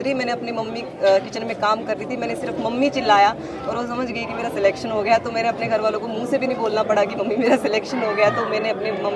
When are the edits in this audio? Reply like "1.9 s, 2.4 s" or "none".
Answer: none